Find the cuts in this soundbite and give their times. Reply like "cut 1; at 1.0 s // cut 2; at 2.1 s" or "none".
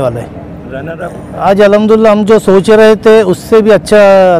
cut 1; at 1.2 s